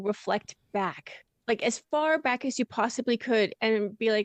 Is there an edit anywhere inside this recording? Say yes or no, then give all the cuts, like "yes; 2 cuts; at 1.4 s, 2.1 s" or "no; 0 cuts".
no; 0 cuts